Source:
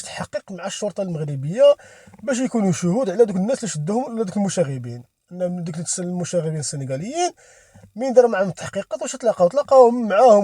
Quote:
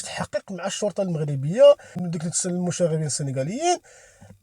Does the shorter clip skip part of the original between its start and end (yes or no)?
yes